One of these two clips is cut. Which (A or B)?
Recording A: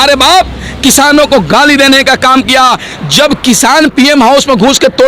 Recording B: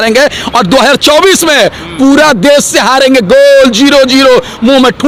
A